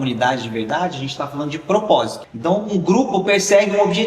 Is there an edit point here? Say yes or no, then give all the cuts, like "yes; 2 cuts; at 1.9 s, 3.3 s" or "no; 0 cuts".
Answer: yes; 1 cut; at 2.2 s